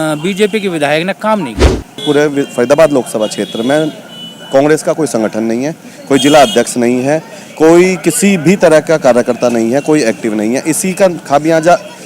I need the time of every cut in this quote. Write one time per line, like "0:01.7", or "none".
0:02.0